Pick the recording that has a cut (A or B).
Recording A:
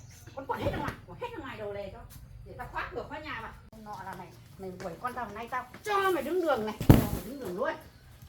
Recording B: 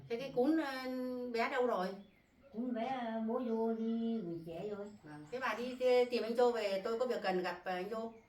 A